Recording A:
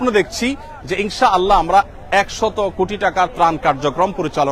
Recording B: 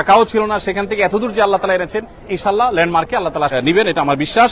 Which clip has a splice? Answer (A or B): B